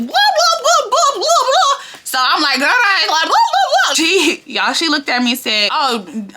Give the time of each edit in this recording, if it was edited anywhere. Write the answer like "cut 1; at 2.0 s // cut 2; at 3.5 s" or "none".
cut 1; at 3.9 s